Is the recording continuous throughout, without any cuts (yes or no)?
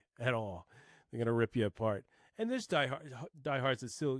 yes